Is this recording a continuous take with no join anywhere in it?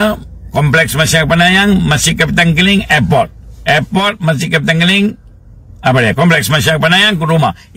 yes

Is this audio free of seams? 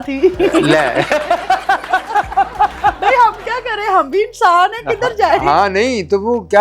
yes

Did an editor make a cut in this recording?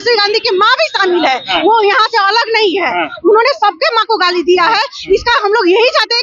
no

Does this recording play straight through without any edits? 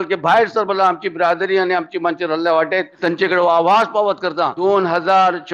no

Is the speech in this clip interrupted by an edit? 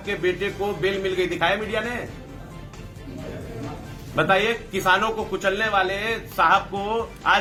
no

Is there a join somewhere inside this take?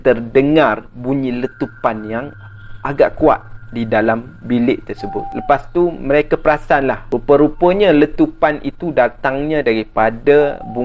yes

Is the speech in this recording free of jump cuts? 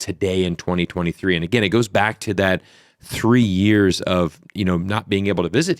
yes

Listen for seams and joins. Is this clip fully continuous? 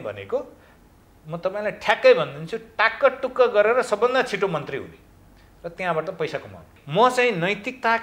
no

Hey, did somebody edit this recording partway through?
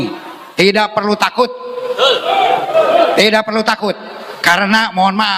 no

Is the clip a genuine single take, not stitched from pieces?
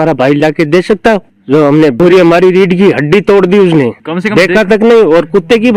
yes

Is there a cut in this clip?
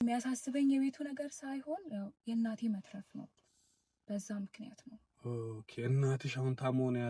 no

